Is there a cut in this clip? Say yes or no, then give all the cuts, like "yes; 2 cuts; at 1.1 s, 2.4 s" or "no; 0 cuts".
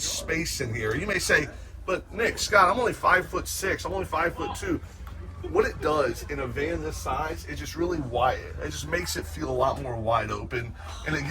no; 0 cuts